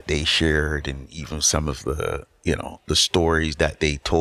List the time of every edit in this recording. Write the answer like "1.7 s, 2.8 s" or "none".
none